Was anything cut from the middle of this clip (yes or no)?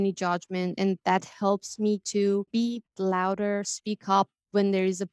no